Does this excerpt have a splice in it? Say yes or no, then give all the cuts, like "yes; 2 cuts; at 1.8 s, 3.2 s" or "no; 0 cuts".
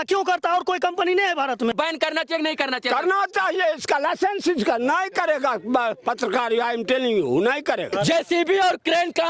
yes; 2 cuts; at 1.7 s, 7.9 s